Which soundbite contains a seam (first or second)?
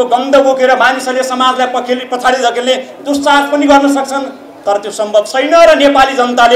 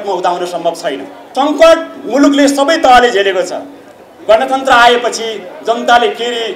second